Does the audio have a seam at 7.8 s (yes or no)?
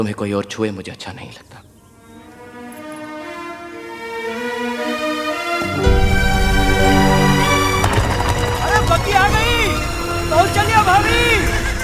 yes